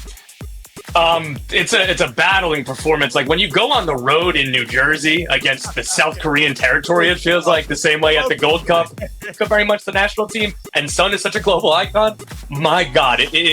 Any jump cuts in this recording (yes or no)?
yes